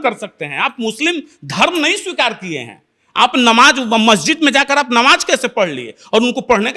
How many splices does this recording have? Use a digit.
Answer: 0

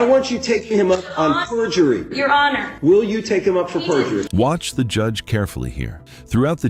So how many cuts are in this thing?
0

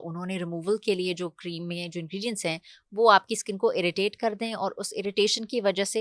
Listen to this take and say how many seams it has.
0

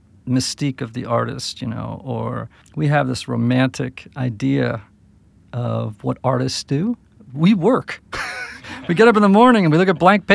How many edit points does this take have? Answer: 1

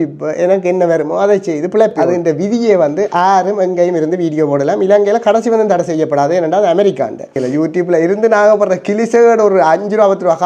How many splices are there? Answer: 2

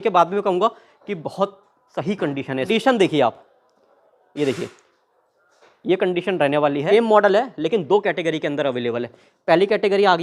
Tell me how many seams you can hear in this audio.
2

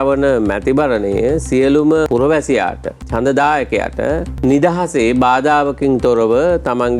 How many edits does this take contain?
2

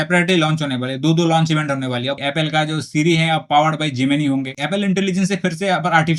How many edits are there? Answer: 2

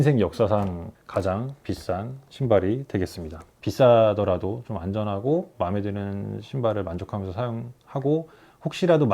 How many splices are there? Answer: 2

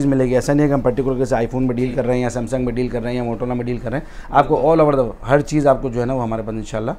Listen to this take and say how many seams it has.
0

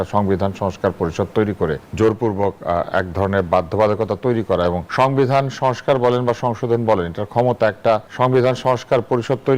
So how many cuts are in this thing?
3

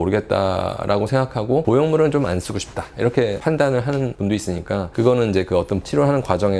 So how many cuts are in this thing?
0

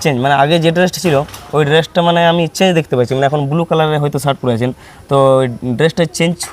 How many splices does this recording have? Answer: 0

